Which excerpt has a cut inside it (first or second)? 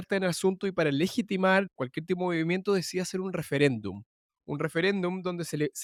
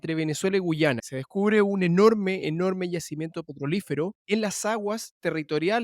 second